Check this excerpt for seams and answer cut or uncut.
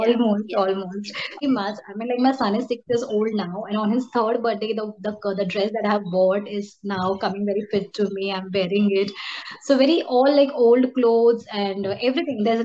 cut